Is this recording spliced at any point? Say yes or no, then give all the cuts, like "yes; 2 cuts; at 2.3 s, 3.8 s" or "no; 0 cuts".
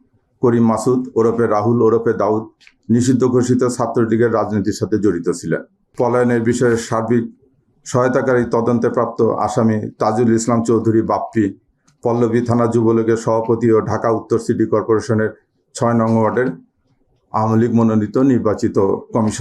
yes; 1 cut; at 5.8 s